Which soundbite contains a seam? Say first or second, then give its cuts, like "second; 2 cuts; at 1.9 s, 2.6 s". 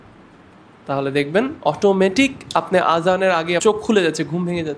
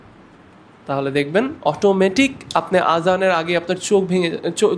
first; 1 cut; at 3.6 s